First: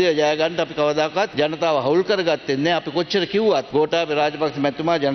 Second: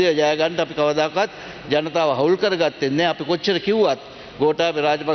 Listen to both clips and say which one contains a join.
first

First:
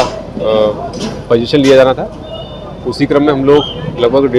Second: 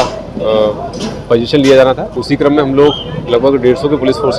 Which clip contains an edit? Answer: second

